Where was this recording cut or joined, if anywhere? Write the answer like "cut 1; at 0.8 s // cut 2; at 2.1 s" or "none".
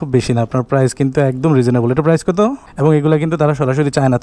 cut 1; at 2.7 s

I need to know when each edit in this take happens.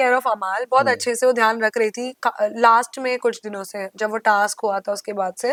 none

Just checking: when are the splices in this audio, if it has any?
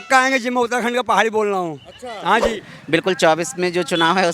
cut 1; at 2.6 s

